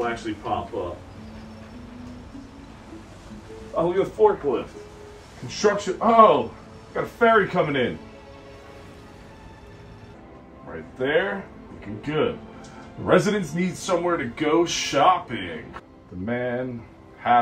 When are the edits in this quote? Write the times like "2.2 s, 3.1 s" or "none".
10.2 s, 15.6 s

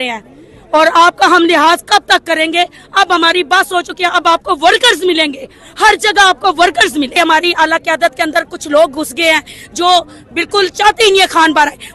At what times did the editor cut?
7.1 s

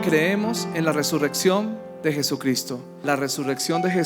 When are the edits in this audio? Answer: 2.9 s

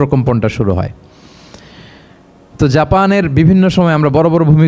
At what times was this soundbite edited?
none

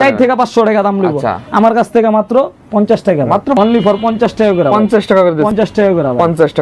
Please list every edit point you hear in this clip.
3.5 s, 5.5 s

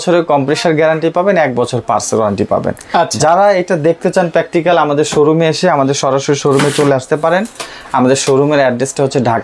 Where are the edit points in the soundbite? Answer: none

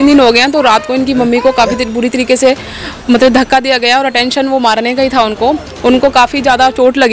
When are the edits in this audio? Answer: none

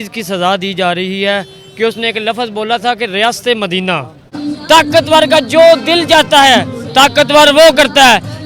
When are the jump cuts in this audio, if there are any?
4.5 s

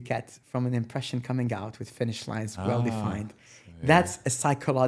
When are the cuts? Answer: none

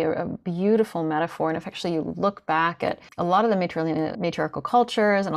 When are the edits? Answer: 3.1 s, 4.2 s

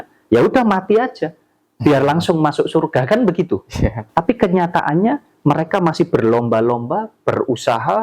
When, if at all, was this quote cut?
4.0 s

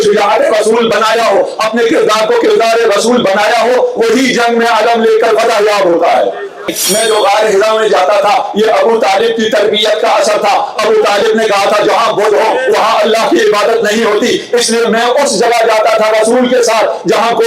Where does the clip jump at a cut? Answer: 6.7 s

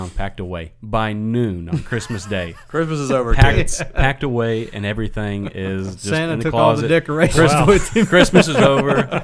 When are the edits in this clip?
none

